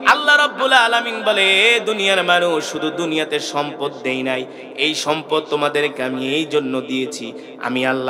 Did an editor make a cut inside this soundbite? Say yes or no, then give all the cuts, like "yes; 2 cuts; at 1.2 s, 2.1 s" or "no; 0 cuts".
no; 0 cuts